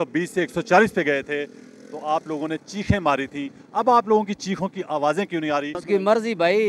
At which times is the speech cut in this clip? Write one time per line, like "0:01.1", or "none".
0:05.8